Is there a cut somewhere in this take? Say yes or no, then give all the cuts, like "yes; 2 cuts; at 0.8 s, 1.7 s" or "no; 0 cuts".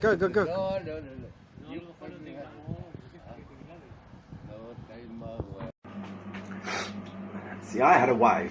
yes; 1 cut; at 5.8 s